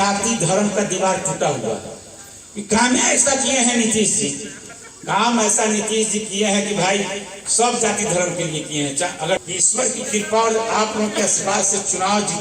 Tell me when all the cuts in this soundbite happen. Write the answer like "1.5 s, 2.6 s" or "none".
9.4 s